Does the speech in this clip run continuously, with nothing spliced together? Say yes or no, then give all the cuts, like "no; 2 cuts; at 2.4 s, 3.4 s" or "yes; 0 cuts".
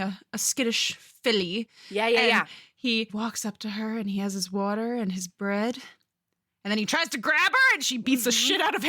no; 1 cut; at 3.1 s